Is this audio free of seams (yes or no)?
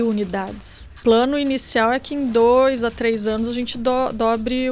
no